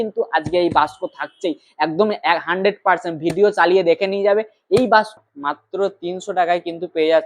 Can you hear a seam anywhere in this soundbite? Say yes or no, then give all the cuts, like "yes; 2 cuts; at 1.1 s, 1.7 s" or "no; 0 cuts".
yes; 1 cut; at 5.1 s